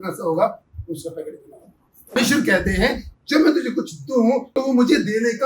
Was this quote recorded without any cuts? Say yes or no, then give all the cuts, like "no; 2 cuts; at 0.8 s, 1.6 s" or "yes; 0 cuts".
no; 2 cuts; at 2.2 s, 4.5 s